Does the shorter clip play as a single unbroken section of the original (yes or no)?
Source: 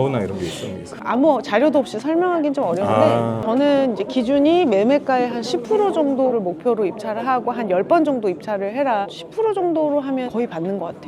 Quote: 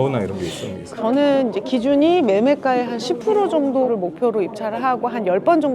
no